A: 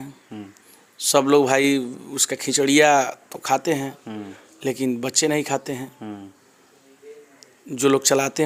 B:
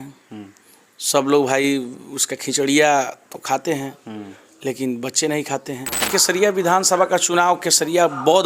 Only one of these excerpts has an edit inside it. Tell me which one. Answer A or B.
B